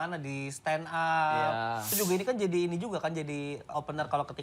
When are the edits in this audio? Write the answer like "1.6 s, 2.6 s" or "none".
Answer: 1.9 s, 3.7 s